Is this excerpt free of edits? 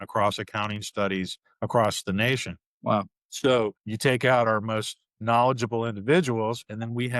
no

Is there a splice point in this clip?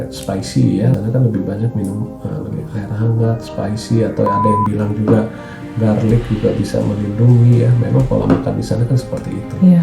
yes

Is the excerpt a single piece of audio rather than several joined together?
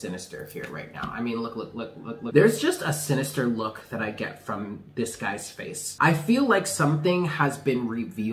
no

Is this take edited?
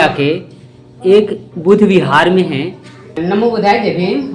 yes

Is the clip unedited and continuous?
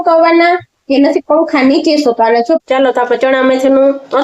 no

